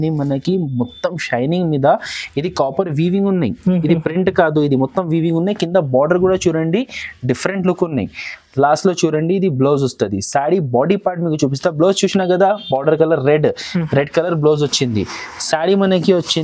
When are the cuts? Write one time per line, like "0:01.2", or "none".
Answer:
none